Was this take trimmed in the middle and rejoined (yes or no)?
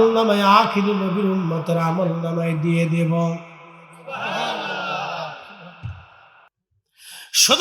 yes